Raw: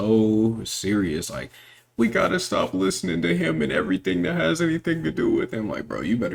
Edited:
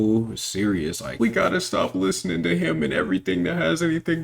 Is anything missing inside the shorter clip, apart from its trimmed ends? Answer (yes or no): yes